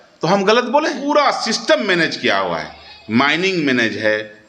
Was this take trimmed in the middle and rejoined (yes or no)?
yes